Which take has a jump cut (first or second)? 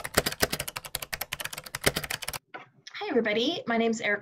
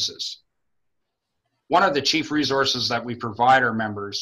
first